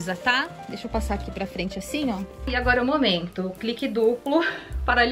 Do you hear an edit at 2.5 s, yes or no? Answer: yes